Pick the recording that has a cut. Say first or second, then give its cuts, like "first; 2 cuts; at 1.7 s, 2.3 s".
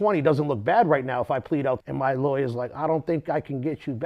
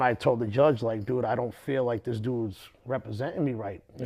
first; 1 cut; at 1.8 s